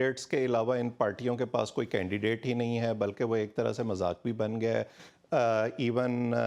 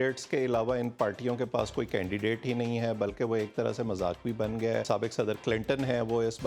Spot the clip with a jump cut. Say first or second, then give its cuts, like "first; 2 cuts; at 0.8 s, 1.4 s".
second; 1 cut; at 4.8 s